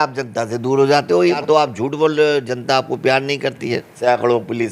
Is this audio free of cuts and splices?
no; 2 cuts; at 1.4 s, 3.9 s

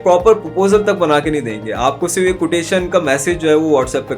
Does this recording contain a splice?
no; 0 cuts

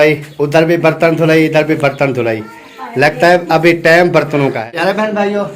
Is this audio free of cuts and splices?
no; 1 cut; at 4.6 s

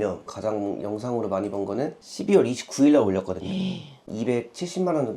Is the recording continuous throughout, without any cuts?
no; 2 cuts; at 2.0 s, 4.0 s

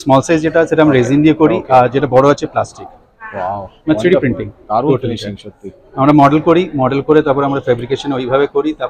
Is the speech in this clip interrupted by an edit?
no; 0 cuts

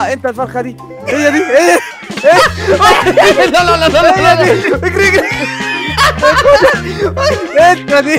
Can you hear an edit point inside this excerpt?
no; 0 cuts

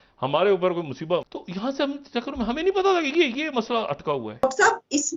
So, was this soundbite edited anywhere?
no; 0 cuts

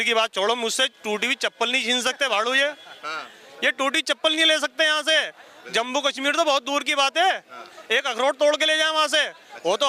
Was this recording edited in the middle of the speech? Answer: no; 0 cuts

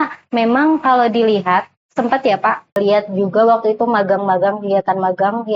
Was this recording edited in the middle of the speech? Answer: yes; 1 cut; at 2.8 s

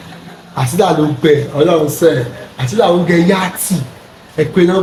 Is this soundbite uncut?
yes; 0 cuts

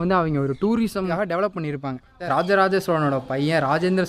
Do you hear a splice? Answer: yes; 2 cuts; at 1.1 s, 2.2 s

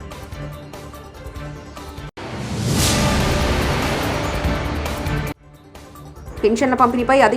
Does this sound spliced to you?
no; 0 cuts

